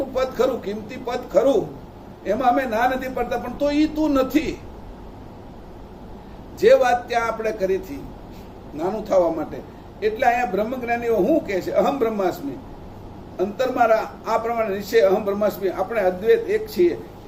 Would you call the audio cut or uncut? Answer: uncut